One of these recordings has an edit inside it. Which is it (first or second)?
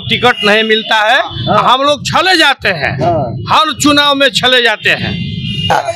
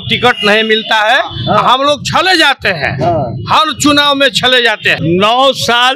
second